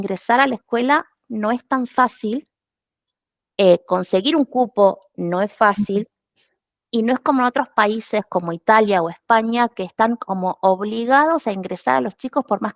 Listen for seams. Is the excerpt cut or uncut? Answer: uncut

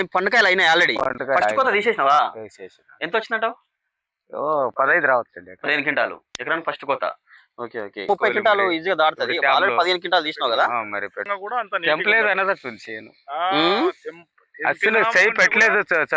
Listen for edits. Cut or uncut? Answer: cut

